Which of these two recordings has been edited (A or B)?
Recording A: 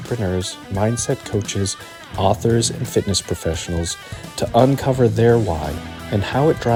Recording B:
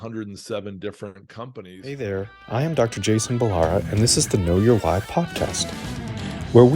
B